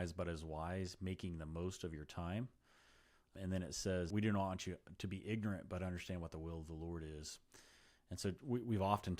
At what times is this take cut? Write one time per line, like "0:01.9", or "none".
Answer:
0:03.4
0:04.1